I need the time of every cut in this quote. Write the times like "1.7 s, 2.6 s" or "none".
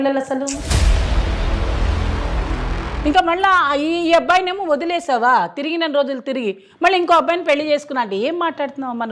2.8 s